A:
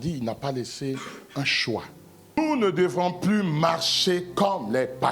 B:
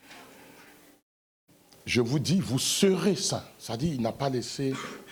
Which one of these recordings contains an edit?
A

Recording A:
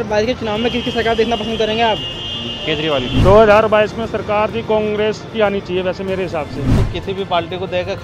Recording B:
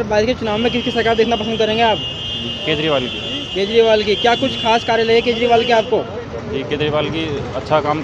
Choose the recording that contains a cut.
A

